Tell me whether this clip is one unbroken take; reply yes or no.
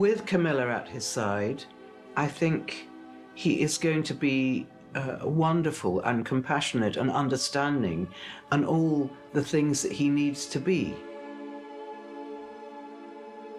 yes